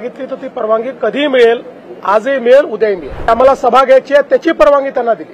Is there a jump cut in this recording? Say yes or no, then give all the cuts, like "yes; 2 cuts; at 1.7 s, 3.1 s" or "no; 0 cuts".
yes; 1 cut; at 3.3 s